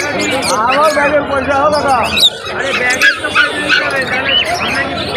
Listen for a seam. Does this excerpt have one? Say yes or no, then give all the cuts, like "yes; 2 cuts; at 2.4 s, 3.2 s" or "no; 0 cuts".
no; 0 cuts